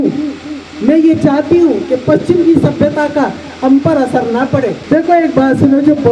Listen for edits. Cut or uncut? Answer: cut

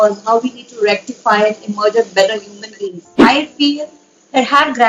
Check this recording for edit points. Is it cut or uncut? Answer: cut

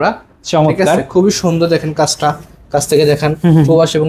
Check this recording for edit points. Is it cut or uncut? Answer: uncut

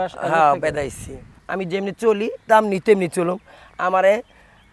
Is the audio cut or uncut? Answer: cut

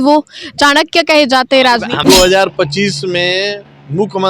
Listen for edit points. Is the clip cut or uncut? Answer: cut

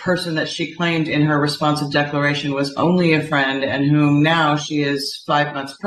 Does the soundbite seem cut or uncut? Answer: uncut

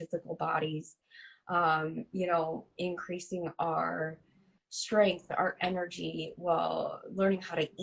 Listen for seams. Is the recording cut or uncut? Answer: uncut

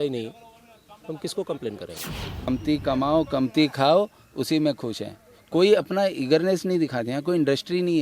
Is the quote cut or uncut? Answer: cut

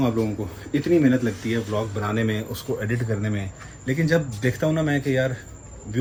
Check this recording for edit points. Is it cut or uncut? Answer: uncut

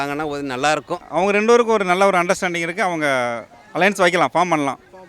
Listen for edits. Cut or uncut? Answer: cut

